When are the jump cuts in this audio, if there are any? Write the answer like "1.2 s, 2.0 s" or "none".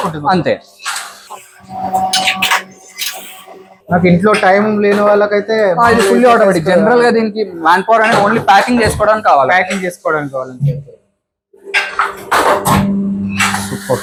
none